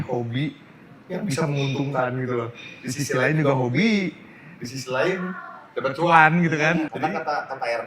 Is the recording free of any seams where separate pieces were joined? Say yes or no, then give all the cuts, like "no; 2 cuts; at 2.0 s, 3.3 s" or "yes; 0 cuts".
no; 1 cut; at 6.9 s